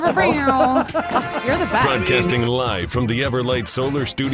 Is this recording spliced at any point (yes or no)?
yes